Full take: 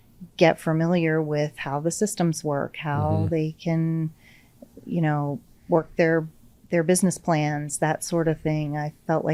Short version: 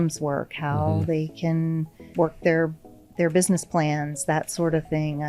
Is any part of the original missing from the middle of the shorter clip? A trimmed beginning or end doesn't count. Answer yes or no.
yes